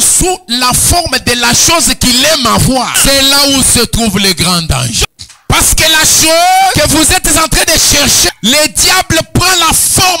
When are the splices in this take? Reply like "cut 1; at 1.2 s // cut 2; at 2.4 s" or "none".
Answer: cut 1; at 2.9 s // cut 2; at 5.0 s // cut 3; at 6.7 s // cut 4; at 8.3 s